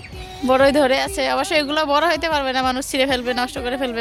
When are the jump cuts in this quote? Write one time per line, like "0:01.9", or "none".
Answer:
none